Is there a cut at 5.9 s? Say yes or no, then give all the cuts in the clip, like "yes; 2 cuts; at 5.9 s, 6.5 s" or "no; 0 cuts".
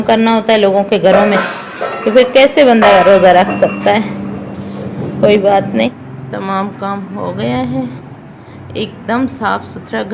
yes; 1 cut; at 5.9 s